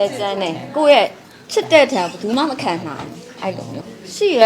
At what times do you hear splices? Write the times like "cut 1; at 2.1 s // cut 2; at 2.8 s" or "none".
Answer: none